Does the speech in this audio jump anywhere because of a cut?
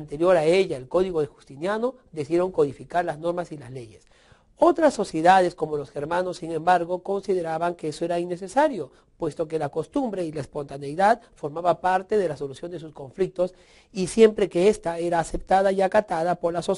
yes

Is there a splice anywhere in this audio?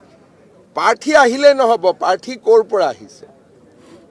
no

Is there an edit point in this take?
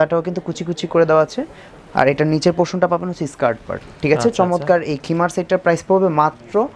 no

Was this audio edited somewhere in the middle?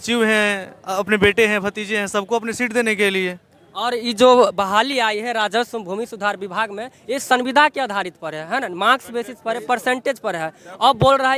no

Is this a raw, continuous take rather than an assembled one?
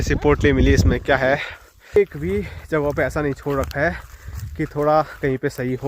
no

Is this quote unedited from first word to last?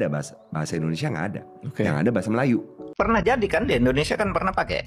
no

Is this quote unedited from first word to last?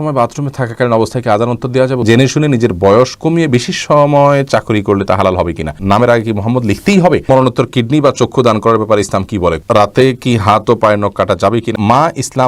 no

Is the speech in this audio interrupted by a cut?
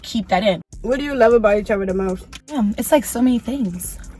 yes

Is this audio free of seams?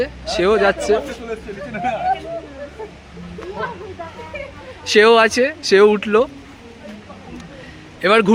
yes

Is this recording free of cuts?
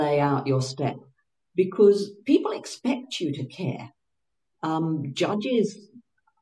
yes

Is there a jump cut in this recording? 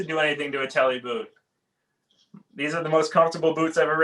no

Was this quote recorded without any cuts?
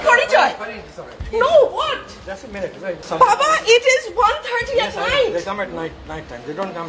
no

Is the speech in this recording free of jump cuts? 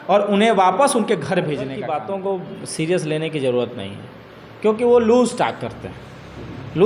no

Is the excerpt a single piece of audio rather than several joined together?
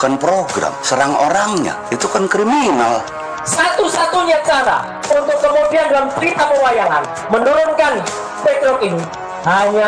no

